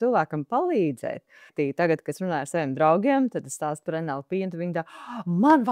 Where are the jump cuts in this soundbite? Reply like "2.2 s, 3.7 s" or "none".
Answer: 1.5 s